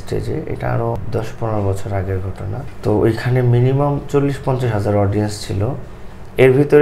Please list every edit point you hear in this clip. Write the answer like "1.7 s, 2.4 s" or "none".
1.0 s, 2.6 s

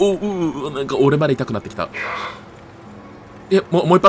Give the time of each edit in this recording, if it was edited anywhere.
2.9 s

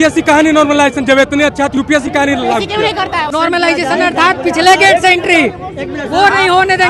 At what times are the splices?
3.3 s

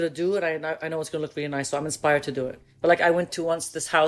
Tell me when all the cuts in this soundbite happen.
2.6 s

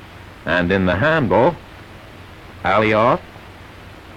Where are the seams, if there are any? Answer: 2.8 s

